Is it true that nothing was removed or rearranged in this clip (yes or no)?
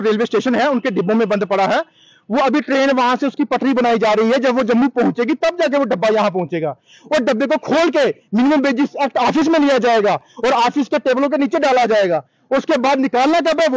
yes